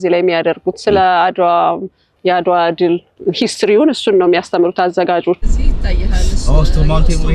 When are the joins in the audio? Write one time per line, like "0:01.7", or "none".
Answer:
0:02.1
0:03.1
0:05.4